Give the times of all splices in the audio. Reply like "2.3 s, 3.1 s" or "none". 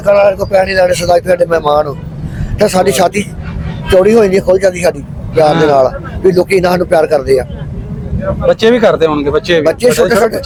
none